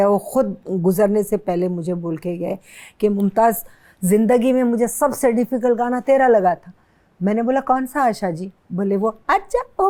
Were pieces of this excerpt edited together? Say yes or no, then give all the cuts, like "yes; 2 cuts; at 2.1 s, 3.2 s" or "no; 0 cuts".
no; 0 cuts